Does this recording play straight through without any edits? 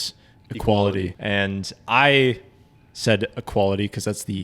no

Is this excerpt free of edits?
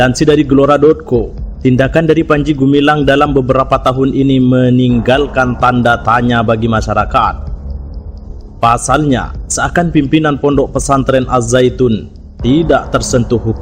yes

